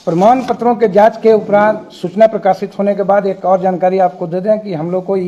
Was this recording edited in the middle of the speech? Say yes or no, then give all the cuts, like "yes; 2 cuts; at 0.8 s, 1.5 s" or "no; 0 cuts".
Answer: no; 0 cuts